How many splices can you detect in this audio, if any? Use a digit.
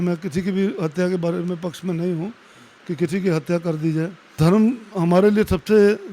1